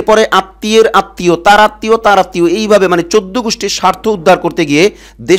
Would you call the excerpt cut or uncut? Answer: uncut